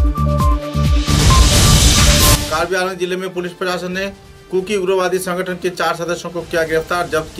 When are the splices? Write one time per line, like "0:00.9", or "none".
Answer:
0:02.4